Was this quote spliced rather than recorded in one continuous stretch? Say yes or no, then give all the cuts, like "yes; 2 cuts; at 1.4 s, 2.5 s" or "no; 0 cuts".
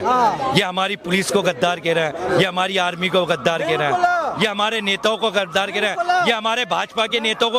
no; 0 cuts